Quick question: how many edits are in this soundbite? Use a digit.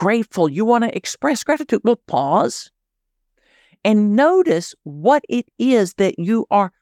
1